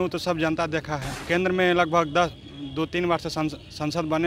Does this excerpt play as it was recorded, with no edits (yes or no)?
no